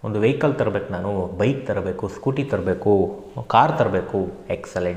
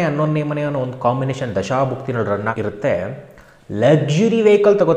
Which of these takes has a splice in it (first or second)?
second